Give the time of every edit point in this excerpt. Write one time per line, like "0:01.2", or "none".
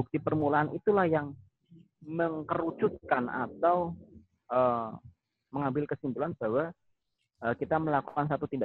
none